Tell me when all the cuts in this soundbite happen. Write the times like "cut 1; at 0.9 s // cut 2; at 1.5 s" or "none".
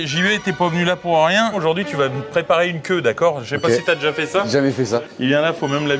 cut 1; at 1.6 s // cut 2; at 5.0 s